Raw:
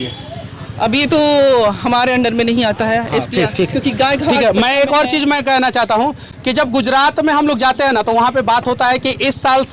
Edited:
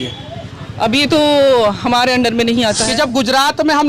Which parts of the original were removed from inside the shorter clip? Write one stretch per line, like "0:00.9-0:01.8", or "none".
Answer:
0:02.8-0:06.4

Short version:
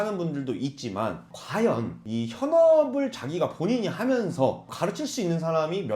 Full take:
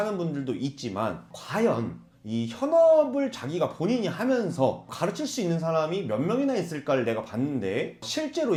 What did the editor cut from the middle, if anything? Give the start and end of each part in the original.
0:02.0-0:02.2

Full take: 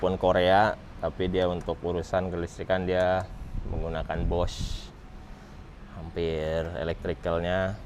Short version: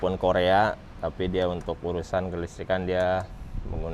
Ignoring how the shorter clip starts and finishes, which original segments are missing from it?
none

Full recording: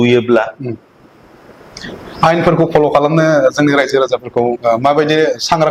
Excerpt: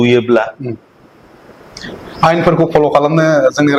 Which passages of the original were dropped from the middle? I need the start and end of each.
none

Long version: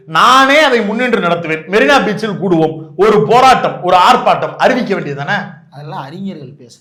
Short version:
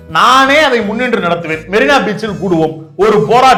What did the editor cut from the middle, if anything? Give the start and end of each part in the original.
none

